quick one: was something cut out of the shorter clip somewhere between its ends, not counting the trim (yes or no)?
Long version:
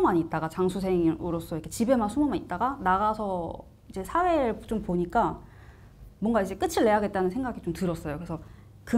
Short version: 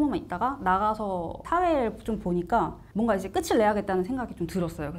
yes